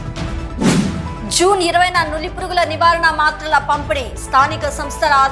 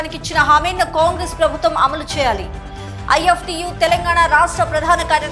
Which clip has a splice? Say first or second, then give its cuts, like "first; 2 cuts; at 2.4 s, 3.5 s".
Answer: first; 1 cut; at 1.0 s